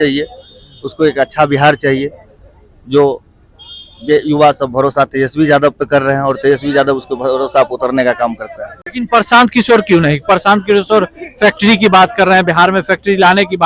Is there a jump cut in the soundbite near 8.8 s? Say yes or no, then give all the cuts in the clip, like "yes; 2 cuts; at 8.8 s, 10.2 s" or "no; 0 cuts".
no; 0 cuts